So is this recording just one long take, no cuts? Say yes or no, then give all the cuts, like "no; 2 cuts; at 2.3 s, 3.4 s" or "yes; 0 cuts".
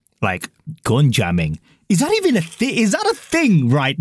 yes; 0 cuts